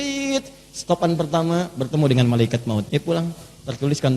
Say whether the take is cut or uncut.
cut